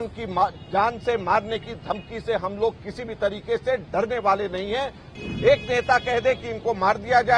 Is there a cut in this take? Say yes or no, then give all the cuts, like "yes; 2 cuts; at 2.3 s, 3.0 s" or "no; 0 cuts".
yes; 1 cut; at 5.0 s